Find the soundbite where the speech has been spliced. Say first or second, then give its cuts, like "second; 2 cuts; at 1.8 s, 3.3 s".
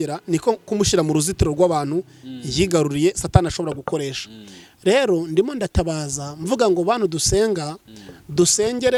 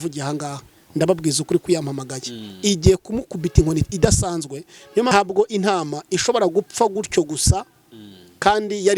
second; 1 cut; at 5.1 s